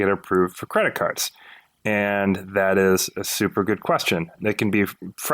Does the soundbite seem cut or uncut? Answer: cut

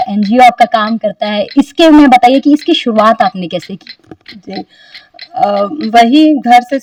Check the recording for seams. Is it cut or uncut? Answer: uncut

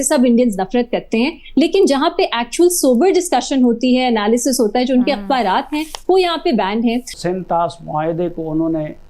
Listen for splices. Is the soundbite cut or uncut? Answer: cut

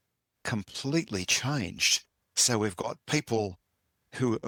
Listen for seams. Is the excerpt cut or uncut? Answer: uncut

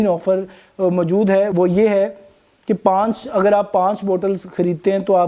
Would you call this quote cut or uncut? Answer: uncut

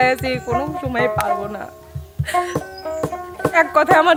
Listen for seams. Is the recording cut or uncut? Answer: uncut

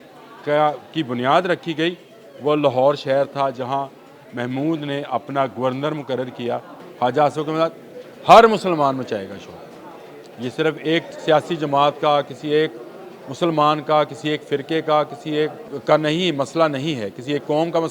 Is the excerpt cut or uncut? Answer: cut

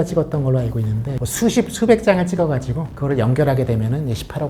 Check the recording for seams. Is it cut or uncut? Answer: cut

